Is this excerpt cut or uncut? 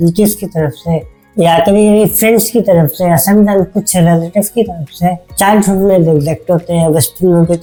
uncut